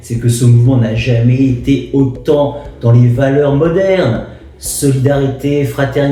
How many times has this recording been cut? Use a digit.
0